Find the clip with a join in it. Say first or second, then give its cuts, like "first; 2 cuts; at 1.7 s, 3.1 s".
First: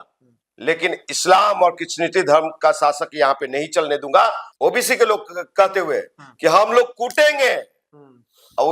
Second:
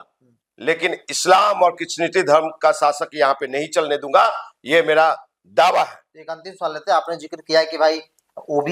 first; 1 cut; at 4.5 s